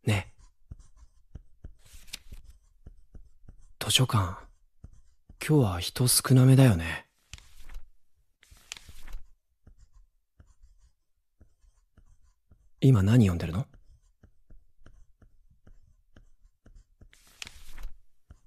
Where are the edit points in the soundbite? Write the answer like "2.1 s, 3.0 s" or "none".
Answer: none